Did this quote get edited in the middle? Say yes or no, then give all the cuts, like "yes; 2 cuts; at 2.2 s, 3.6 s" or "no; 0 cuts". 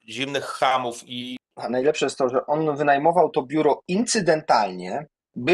yes; 1 cut; at 1.4 s